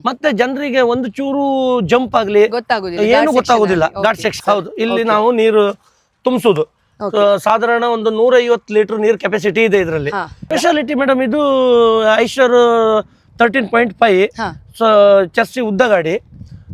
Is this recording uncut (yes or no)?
no